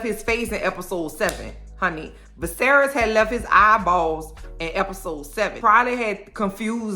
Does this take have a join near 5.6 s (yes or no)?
yes